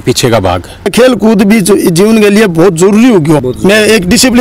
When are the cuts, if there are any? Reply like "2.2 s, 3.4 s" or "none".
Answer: 0.9 s, 3.5 s